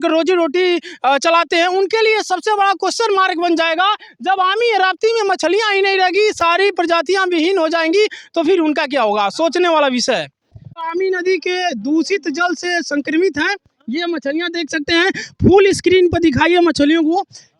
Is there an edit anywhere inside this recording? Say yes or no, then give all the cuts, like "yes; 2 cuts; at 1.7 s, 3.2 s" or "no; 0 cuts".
no; 0 cuts